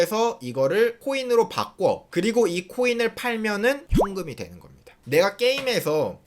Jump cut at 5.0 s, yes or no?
yes